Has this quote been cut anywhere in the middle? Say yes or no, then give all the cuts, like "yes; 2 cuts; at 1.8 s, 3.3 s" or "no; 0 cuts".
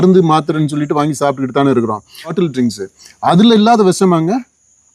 yes; 1 cut; at 2.3 s